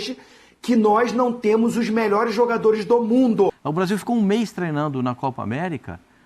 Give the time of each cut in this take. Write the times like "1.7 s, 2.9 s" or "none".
3.6 s